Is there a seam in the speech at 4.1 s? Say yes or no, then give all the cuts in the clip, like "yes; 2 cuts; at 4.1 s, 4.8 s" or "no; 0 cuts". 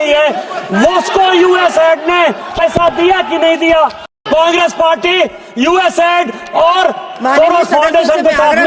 yes; 1 cut; at 4.1 s